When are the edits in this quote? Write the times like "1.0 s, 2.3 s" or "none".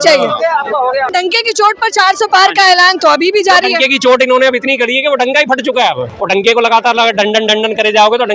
1.1 s, 6.1 s

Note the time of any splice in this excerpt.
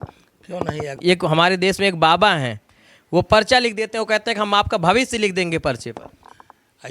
0.9 s

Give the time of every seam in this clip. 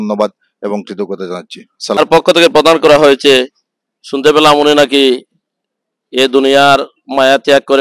2.0 s

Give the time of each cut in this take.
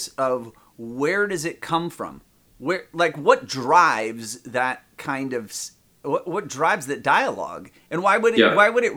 none

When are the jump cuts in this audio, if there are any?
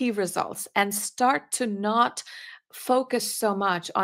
none

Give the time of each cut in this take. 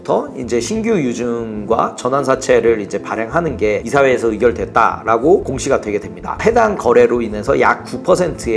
6.4 s

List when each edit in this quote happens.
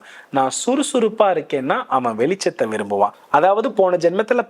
3.2 s

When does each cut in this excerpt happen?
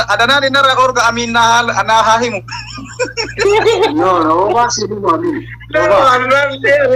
none

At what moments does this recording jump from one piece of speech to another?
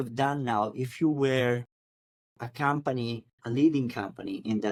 none

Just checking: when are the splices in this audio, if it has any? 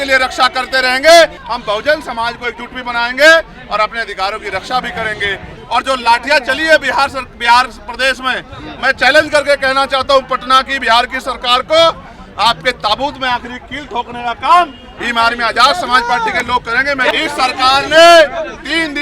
1.4 s, 5.6 s, 17.1 s

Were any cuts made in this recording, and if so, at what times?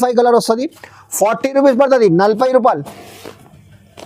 none

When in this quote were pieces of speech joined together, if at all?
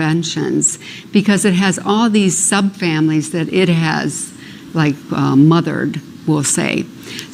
none

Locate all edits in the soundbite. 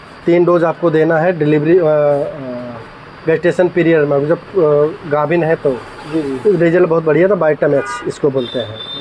none

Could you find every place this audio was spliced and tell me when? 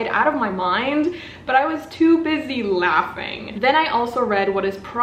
3.5 s

